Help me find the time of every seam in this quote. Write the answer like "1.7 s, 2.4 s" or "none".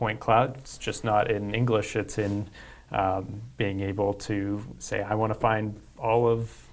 none